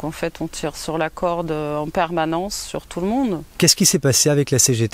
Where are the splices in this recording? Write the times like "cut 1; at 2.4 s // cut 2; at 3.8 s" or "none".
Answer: cut 1; at 3.5 s